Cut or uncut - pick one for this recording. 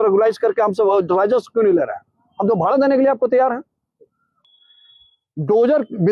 cut